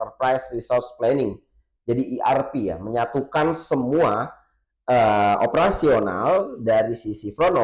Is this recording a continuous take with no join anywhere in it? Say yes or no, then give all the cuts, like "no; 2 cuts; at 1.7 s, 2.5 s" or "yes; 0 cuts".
yes; 0 cuts